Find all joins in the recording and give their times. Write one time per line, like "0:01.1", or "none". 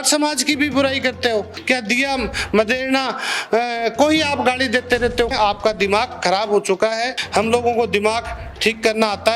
0:01.5
0:05.3
0:07.2